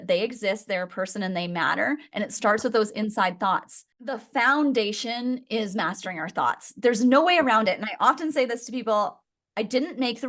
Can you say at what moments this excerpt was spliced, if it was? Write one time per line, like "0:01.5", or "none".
0:04.2